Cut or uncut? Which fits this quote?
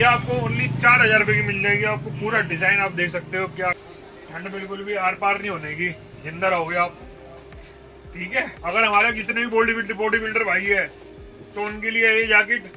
cut